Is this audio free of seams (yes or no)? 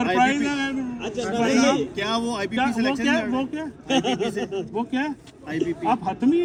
yes